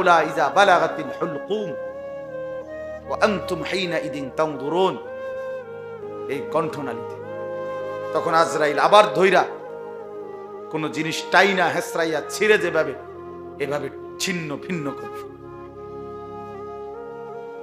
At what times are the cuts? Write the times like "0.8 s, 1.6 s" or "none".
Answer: none